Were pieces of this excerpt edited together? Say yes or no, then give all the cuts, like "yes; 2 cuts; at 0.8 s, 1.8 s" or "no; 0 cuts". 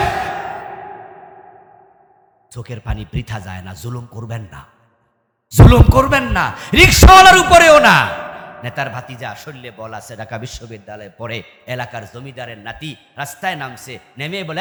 no; 0 cuts